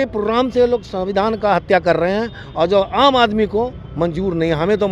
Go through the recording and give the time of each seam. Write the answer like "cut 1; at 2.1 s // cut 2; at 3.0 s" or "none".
none